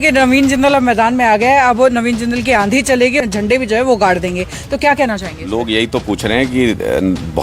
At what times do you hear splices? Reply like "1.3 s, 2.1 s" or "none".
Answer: 3.2 s